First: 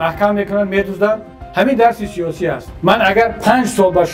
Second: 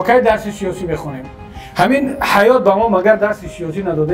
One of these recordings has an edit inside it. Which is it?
first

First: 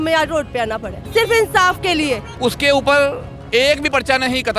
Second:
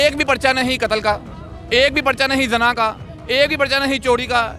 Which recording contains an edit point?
first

